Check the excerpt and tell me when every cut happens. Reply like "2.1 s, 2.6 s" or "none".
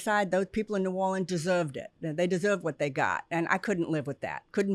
none